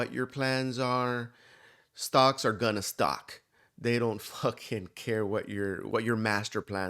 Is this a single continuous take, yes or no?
no